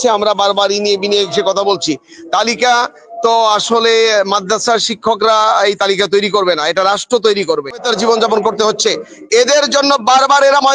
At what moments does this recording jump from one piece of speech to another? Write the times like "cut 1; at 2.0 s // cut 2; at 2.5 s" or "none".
cut 1; at 7.9 s

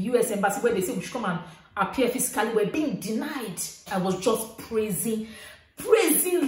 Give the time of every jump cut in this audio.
cut 1; at 3.9 s

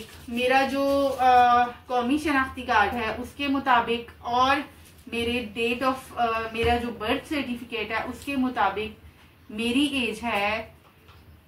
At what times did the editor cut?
none

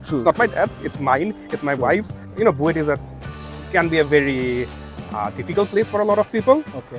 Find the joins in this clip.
cut 1; at 2.2 s

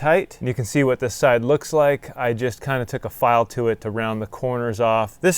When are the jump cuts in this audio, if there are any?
none

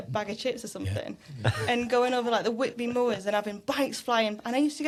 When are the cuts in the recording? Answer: none

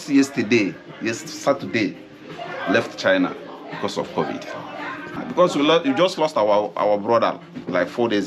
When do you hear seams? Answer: cut 1; at 5.2 s

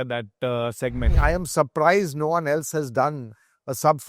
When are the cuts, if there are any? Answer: cut 1; at 1.1 s

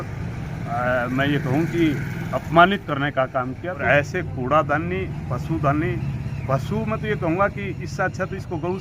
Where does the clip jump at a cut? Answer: cut 1; at 3.8 s

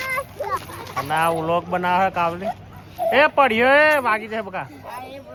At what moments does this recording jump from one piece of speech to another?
none

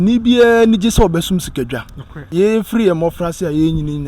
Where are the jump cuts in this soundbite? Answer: cut 1; at 2.2 s

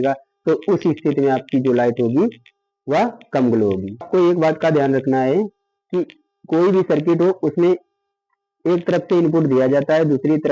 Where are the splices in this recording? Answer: cut 1; at 4.1 s

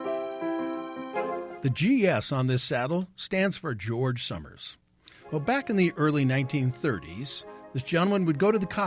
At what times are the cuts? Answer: cut 1; at 1.5 s

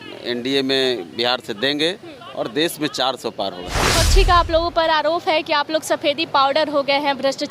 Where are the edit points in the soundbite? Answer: cut 1; at 3.9 s

